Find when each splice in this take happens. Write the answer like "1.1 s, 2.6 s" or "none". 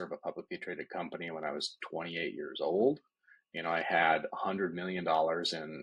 none